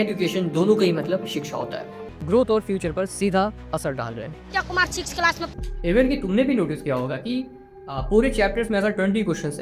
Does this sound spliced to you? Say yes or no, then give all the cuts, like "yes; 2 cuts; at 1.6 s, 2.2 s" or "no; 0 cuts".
yes; 2 cuts; at 2.0 s, 5.4 s